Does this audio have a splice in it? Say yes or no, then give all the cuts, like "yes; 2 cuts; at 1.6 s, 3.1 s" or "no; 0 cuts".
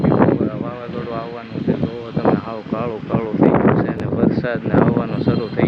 no; 0 cuts